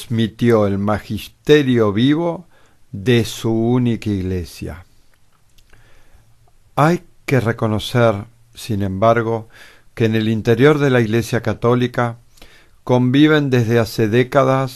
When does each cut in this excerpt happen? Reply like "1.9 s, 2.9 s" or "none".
none